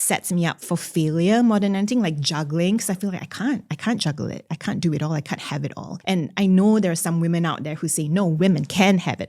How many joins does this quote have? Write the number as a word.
one